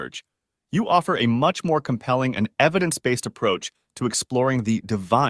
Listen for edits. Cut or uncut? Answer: uncut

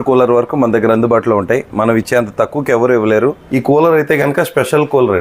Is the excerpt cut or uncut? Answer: cut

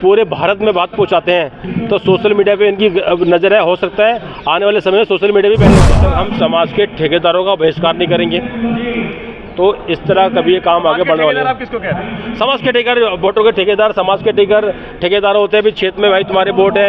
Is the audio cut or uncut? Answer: cut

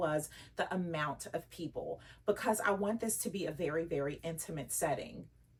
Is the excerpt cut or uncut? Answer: uncut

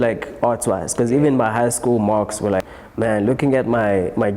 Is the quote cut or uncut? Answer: cut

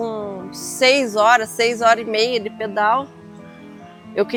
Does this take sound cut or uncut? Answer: uncut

